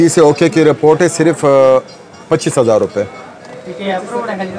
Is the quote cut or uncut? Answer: uncut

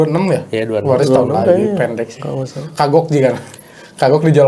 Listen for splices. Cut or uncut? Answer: uncut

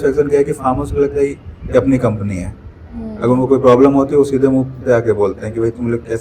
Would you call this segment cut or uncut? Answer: uncut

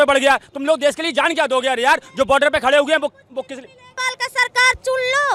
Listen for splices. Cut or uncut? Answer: uncut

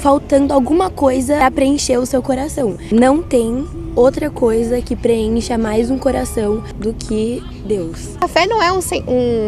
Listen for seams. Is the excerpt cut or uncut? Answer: cut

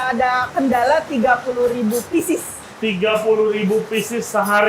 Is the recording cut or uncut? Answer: uncut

